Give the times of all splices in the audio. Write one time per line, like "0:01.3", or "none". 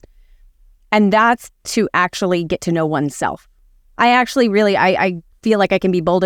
none